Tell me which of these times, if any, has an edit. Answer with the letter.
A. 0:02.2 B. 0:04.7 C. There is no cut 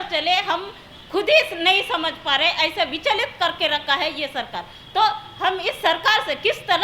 C